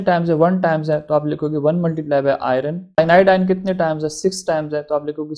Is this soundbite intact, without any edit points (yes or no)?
no